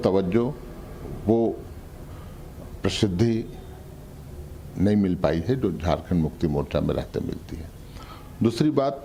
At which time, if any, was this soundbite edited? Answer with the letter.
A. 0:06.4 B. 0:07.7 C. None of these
C